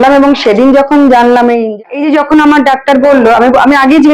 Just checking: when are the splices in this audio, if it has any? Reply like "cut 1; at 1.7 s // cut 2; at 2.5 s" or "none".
cut 1; at 1.8 s